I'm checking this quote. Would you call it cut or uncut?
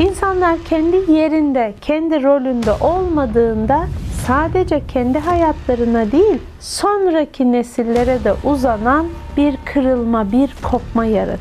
uncut